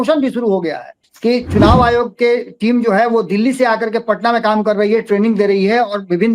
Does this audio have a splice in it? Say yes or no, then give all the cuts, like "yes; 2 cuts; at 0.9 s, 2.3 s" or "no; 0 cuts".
yes; 1 cut; at 1.0 s